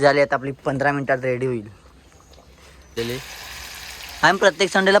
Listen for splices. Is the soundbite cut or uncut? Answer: cut